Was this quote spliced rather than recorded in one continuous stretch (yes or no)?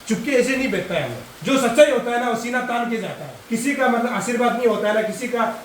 yes